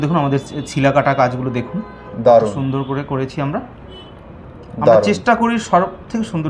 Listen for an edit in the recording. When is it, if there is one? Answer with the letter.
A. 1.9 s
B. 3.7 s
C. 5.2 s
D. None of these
D